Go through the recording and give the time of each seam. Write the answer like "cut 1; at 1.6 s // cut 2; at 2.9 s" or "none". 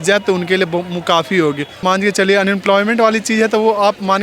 cut 1; at 1.8 s